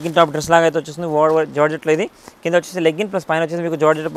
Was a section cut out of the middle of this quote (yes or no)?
no